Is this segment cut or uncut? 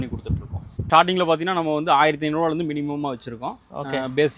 cut